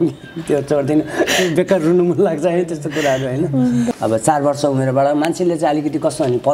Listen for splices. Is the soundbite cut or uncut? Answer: uncut